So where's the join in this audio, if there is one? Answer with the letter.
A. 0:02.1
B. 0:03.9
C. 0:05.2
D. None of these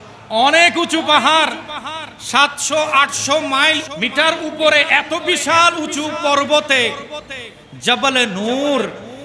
B